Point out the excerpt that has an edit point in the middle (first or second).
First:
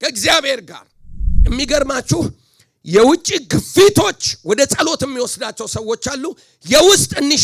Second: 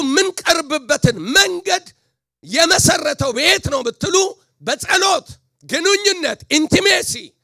first